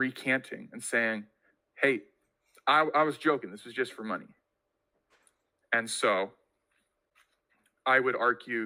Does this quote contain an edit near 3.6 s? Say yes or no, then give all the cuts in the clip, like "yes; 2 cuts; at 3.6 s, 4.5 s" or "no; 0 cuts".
no; 0 cuts